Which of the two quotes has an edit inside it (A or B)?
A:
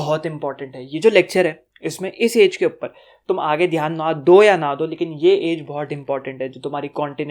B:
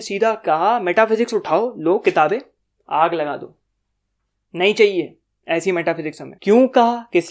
B